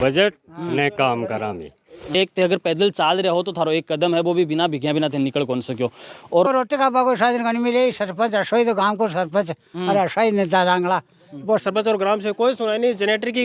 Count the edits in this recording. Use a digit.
3